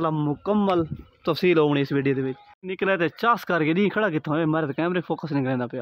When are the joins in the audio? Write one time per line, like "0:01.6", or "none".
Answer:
0:02.7